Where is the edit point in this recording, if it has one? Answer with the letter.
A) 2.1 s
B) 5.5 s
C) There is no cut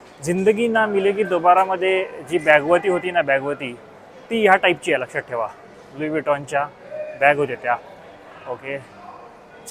C